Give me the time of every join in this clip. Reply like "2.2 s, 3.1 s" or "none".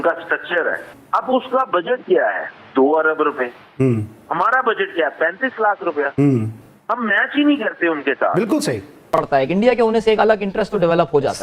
0.9 s, 9.1 s